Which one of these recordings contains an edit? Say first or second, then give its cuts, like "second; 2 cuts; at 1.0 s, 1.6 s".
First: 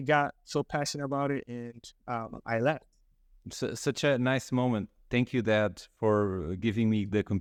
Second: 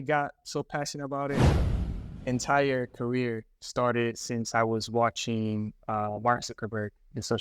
second; 1 cut; at 1.5 s